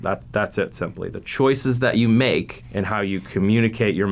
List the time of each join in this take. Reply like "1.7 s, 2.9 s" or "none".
2.6 s